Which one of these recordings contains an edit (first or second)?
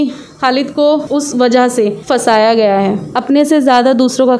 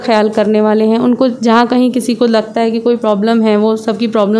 first